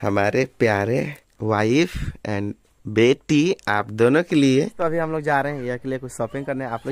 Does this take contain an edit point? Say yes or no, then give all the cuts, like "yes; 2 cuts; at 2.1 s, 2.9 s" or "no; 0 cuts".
yes; 2 cuts; at 1.2 s, 4.7 s